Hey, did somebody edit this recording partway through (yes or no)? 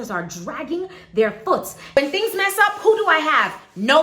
yes